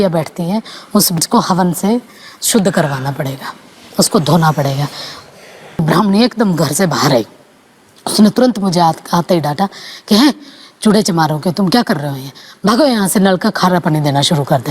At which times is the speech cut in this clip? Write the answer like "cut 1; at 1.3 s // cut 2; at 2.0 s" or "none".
cut 1; at 1.2 s // cut 2; at 5.8 s